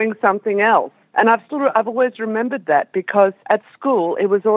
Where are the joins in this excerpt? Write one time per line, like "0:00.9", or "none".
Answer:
0:01.0
0:03.4